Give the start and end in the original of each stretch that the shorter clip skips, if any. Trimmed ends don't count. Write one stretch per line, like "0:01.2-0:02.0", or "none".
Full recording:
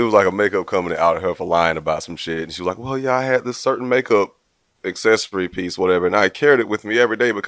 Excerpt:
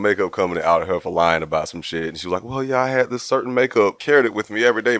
0:04.4-0:06.3

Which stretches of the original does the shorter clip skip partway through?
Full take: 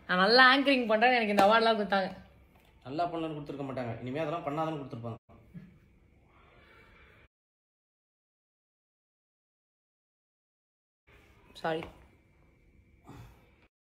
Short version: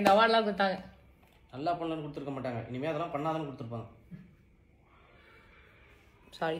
0:05.2-0:05.3
0:07.3-0:11.1

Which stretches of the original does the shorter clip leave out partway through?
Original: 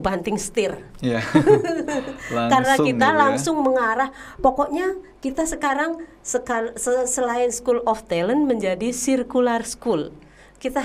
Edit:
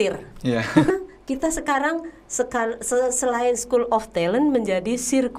0:01.5-0:04.9

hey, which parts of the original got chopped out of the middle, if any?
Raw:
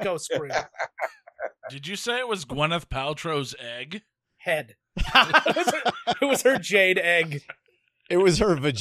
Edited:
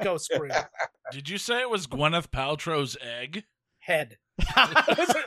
0:00.9-0:01.5

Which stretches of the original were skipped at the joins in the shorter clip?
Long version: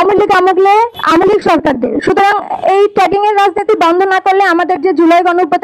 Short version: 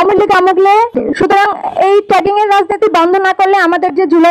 0:01.0-0:01.8

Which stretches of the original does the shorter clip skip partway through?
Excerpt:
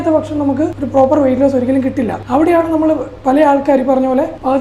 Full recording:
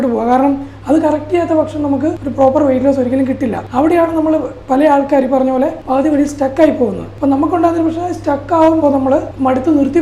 none

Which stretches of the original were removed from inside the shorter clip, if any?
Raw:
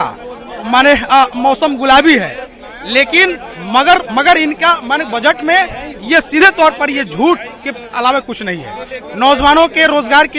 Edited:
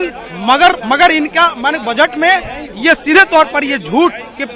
none

